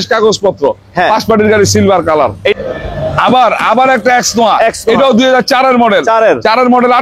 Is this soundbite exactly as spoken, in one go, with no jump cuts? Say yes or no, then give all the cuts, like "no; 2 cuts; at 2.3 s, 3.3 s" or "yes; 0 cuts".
no; 1 cut; at 2.5 s